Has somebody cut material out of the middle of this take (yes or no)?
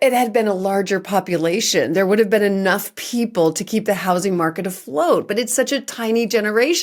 no